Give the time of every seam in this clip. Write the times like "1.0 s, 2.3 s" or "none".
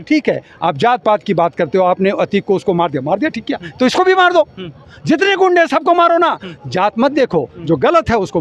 none